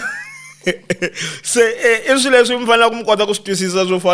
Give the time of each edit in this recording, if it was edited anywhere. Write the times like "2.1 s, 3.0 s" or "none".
none